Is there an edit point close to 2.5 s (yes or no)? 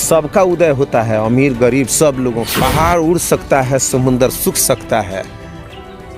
yes